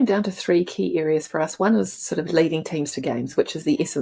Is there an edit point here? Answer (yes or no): no